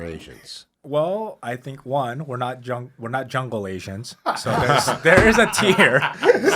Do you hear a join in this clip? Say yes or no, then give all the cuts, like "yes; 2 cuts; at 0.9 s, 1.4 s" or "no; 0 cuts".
no; 0 cuts